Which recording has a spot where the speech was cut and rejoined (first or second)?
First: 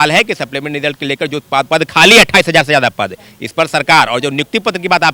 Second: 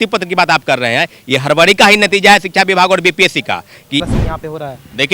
second